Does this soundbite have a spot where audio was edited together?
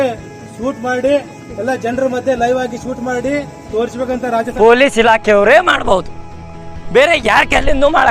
yes; 1 cut; at 4.5 s

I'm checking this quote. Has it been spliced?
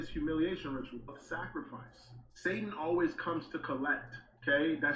yes; 1 cut; at 1.1 s

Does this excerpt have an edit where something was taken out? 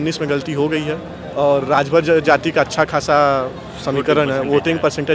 yes; 1 cut; at 1.2 s

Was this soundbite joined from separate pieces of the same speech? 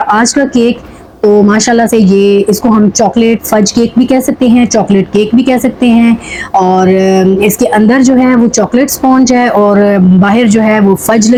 no; 0 cuts

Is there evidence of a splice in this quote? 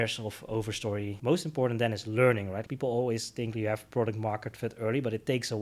yes; 2 cuts; at 1.1 s, 2.6 s

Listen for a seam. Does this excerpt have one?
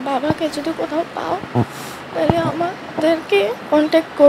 no; 0 cuts

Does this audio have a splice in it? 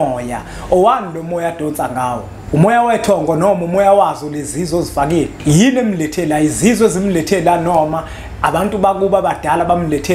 yes; 2 cuts; at 2.3 s, 5.3 s

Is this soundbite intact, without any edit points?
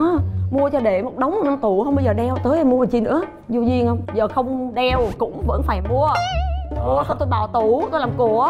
yes; 0 cuts

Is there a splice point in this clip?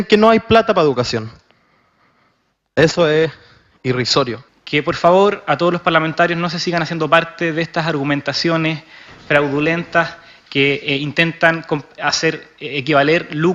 yes; 1 cut; at 7.0 s

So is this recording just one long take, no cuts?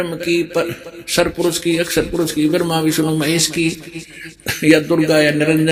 yes; 0 cuts

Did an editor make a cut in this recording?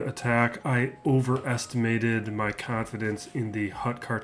no; 0 cuts

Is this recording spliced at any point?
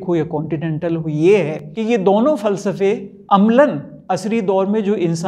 yes; 3 cuts; at 1.6 s, 3.1 s, 3.9 s

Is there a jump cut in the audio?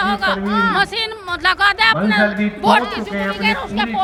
no; 0 cuts

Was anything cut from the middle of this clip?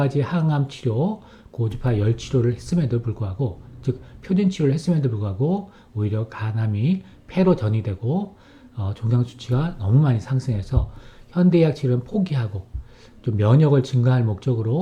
no; 0 cuts

